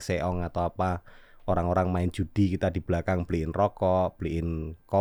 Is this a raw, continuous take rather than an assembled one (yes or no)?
yes